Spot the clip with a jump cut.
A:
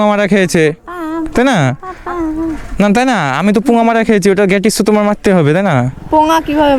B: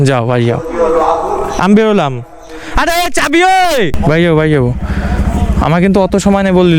B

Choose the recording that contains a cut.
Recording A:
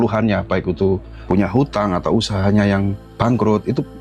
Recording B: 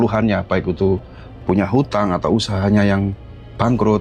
A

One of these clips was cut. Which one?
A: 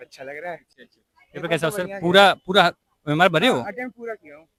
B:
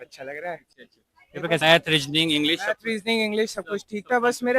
B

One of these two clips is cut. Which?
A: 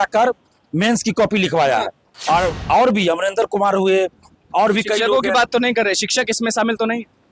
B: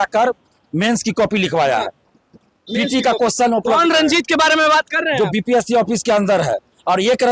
A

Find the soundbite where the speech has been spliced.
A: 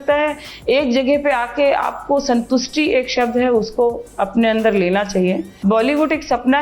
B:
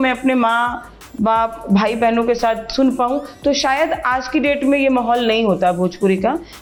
A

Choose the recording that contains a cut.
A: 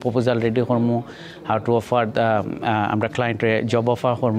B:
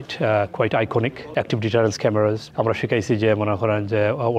B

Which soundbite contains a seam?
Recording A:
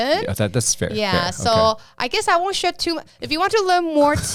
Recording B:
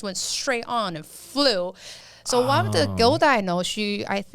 B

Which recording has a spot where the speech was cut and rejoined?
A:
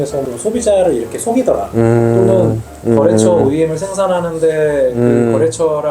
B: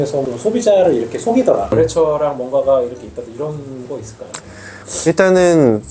B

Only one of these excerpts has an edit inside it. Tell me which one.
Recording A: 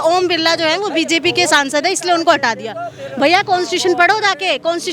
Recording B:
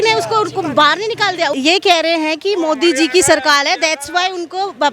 B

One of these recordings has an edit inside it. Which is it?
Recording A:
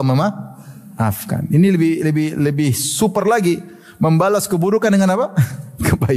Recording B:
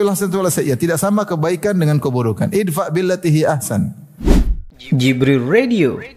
B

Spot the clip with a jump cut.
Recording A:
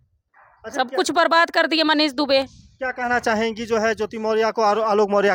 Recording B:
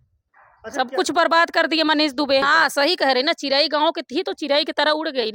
B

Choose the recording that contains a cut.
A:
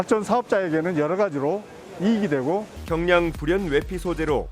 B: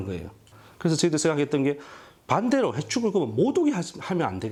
A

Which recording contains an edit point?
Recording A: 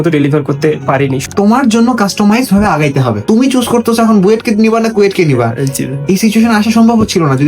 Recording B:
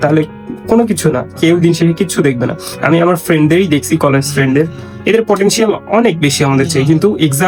A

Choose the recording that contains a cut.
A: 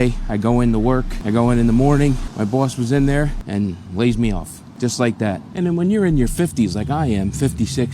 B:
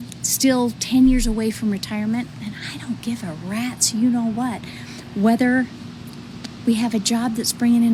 A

